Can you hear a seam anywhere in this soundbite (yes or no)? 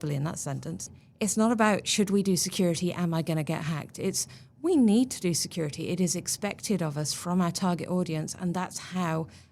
yes